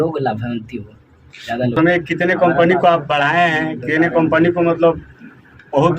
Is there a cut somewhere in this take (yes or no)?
yes